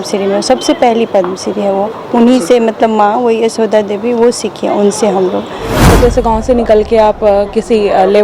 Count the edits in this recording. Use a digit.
1